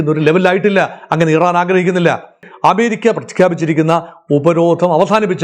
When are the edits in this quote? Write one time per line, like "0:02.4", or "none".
0:02.5